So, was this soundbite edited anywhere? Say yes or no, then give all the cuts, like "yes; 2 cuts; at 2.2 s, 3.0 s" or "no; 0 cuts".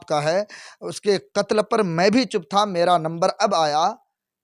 no; 0 cuts